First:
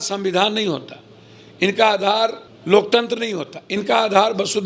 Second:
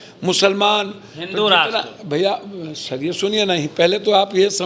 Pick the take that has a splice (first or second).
first